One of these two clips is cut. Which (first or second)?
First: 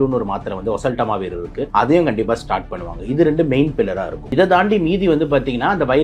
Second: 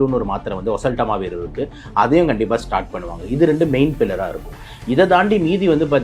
first